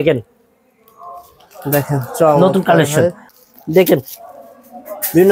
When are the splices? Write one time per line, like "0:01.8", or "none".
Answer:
0:03.3